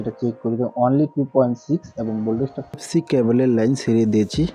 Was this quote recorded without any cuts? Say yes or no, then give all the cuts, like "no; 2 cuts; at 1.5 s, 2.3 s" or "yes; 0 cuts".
no; 1 cut; at 2.8 s